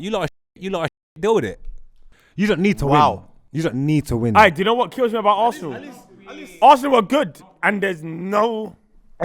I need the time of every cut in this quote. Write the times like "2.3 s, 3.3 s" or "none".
none